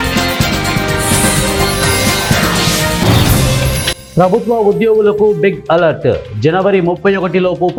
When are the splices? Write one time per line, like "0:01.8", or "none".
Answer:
none